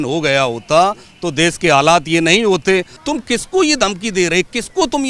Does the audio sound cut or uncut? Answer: cut